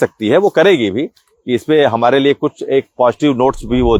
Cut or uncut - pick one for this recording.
uncut